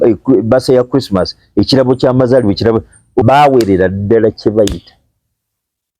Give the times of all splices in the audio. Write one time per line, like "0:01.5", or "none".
0:03.2